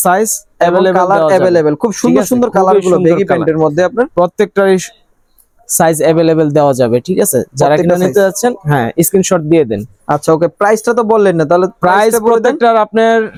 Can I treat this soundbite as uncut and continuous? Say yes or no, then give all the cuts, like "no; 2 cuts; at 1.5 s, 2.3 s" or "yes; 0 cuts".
yes; 0 cuts